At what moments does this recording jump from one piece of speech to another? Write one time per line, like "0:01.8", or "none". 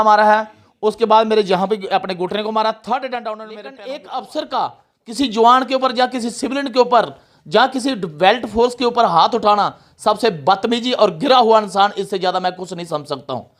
0:03.7